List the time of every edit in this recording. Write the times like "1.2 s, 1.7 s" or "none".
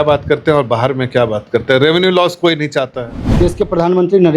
3.3 s